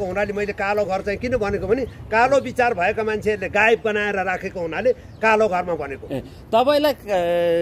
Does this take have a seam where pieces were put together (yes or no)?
no